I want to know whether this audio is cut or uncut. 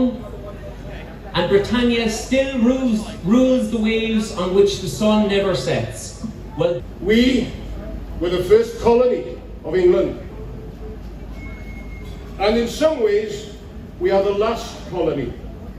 cut